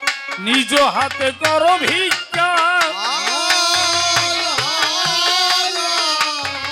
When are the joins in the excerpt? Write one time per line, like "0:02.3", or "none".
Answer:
none